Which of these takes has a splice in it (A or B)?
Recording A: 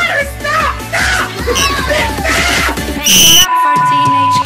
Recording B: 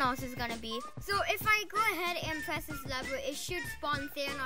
A